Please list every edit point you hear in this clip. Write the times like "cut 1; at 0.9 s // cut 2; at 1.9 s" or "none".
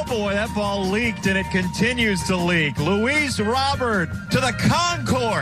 cut 1; at 4.2 s